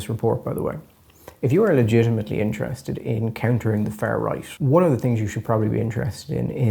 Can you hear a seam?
yes; 1 cut; at 4.5 s

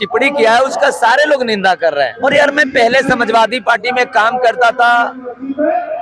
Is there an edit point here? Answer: yes; 1 cut; at 2.1 s

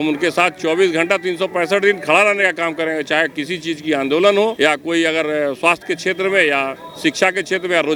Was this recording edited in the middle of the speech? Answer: no; 0 cuts

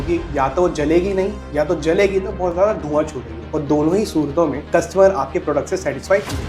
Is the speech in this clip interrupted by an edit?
no; 0 cuts

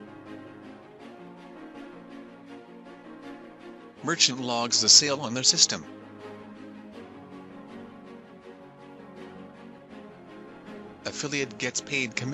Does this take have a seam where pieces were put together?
no; 0 cuts

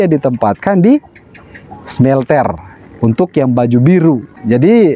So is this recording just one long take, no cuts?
yes; 0 cuts

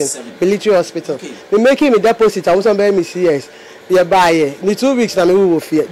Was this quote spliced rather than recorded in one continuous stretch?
no; 0 cuts

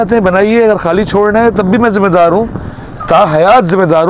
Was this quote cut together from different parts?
no; 0 cuts

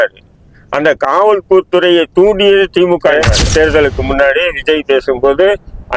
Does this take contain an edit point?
yes; 1 cut; at 3.1 s

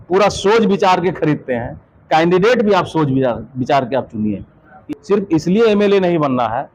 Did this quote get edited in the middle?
yes; 1 cut; at 4.8 s

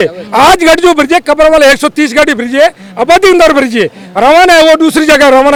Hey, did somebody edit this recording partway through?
no; 0 cuts

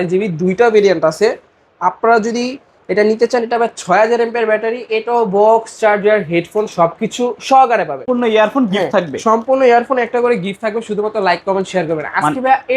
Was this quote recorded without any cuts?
no; 1 cut; at 8.1 s

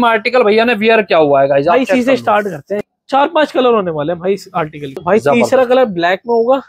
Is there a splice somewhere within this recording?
yes; 2 cuts; at 2.9 s, 5.0 s

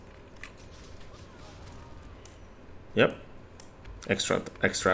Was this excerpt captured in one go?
yes; 0 cuts

